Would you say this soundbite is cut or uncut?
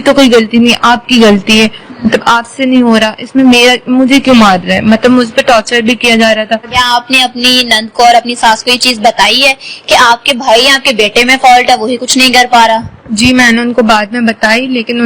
cut